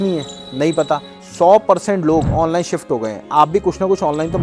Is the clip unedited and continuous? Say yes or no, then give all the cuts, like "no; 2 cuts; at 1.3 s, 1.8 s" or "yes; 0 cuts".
no; 1 cut; at 1.1 s